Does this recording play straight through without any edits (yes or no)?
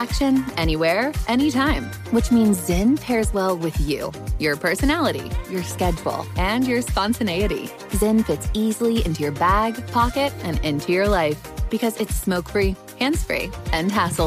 yes